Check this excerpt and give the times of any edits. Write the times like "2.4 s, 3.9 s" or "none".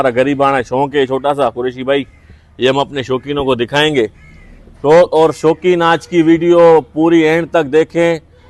none